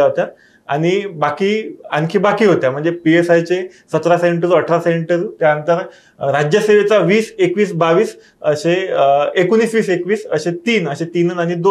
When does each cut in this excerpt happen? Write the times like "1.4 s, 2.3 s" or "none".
none